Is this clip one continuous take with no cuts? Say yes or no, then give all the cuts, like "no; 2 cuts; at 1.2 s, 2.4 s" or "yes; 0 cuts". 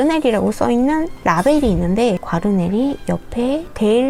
yes; 0 cuts